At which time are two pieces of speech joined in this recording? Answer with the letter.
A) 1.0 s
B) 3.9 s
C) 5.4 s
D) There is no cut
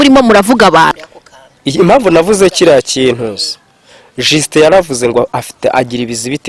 A